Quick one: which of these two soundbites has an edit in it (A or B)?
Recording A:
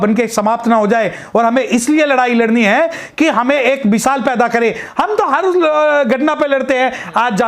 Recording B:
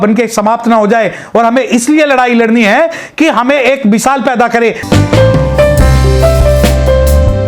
B